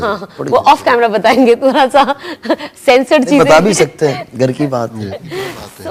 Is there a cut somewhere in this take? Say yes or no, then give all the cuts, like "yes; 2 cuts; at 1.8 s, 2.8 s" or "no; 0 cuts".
no; 0 cuts